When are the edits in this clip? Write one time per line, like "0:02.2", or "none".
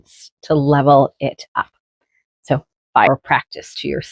0:03.1

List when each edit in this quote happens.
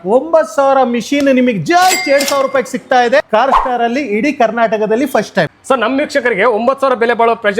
0:03.2
0:05.6

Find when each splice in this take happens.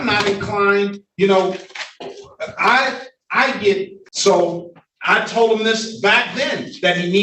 0:04.0

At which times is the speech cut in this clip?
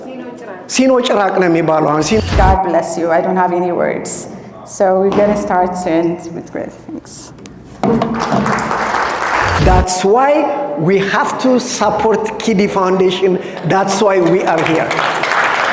0:02.2
0:09.6

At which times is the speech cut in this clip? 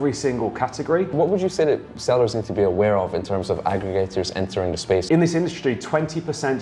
0:01.1
0:05.1

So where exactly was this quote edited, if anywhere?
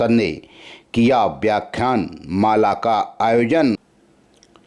0:03.8

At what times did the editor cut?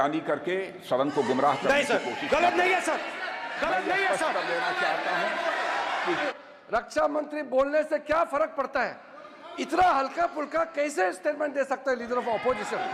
0:06.3

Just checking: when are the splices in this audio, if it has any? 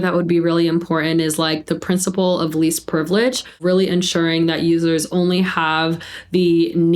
0:03.6

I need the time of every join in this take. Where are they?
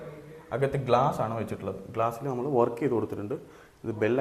none

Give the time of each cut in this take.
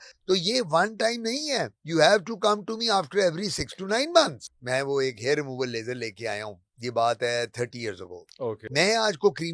0:04.4
0:08.7

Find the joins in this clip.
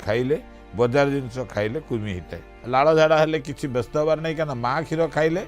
0:02.6

